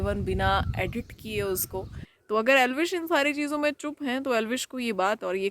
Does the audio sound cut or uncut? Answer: cut